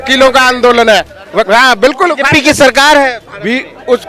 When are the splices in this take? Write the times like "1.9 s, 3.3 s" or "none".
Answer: 1.5 s